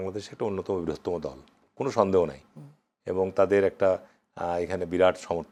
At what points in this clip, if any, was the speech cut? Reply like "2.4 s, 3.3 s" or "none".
none